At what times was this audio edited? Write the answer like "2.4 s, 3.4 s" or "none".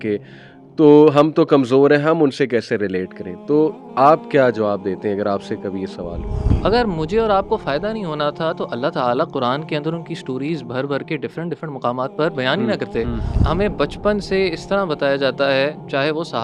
6.5 s, 13.4 s